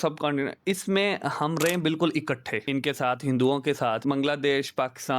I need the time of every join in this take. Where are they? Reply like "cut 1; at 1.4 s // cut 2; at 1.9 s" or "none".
cut 1; at 2.5 s // cut 2; at 4.0 s